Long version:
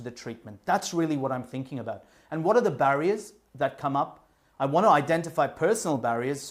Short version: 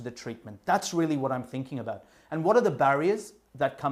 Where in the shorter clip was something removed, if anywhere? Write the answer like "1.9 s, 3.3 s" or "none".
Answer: none